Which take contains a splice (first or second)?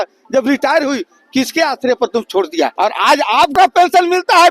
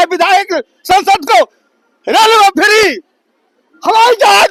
first